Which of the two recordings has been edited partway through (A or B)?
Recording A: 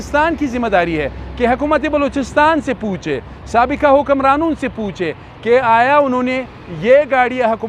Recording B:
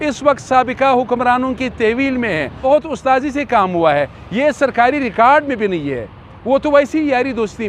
B